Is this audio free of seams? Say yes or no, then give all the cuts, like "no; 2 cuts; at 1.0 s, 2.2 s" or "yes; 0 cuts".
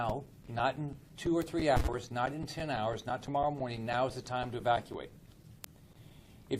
yes; 0 cuts